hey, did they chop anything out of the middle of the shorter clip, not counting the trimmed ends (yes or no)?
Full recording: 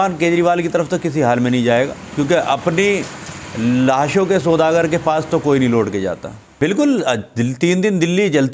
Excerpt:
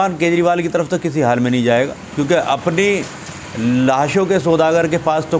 no